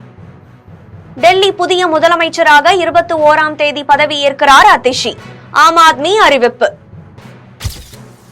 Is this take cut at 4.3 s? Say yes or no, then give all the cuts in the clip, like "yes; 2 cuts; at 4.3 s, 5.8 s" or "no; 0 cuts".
no; 1 cut; at 1.1 s